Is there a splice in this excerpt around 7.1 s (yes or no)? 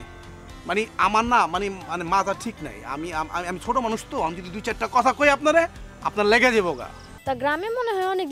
yes